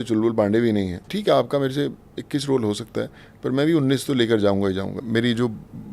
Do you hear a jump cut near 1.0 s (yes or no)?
yes